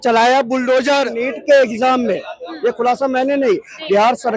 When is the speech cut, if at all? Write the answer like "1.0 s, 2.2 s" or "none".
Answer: 1.3 s